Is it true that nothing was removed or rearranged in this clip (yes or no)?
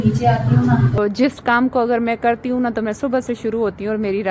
no